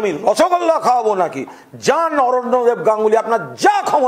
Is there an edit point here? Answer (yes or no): no